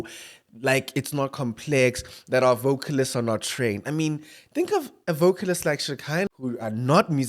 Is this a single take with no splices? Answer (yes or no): no